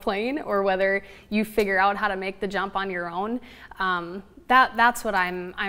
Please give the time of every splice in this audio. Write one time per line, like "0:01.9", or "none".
none